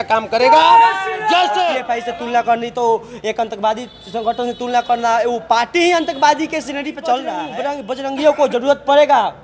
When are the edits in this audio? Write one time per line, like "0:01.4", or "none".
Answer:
0:01.9
0:07.5